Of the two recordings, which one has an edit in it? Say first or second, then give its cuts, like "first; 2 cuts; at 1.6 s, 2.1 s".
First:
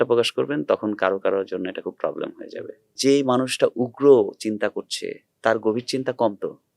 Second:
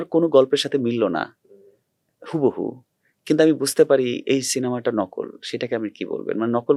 first; 1 cut; at 2.9 s